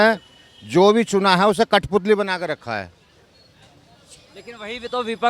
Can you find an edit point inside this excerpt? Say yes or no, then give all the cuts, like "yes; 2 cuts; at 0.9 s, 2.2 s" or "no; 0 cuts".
no; 0 cuts